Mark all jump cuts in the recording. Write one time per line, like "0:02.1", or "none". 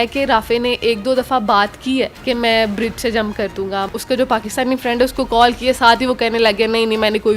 0:02.2
0:03.9